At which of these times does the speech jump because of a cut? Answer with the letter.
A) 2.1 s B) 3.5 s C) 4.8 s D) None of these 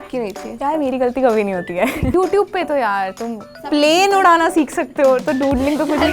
A